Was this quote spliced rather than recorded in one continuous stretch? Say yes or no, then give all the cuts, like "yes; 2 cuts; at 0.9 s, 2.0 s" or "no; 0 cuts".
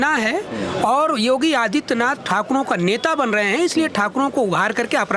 no; 0 cuts